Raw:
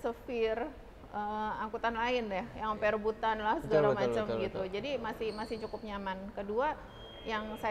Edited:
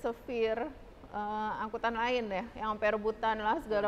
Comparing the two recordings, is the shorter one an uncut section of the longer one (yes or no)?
yes